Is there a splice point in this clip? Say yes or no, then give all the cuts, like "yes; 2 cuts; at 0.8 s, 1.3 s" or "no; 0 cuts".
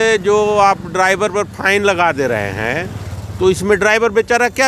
no; 0 cuts